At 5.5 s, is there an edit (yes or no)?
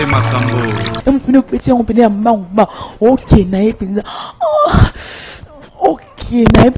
no